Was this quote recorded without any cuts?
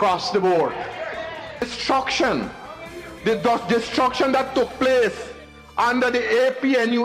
no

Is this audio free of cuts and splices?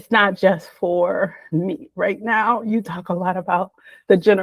yes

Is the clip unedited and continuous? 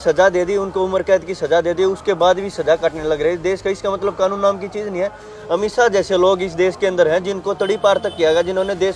yes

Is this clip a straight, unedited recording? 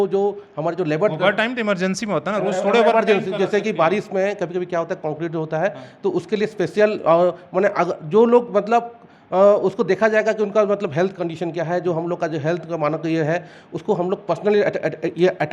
yes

